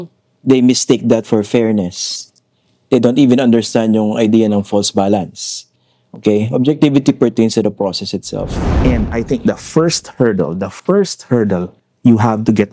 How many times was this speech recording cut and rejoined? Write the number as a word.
one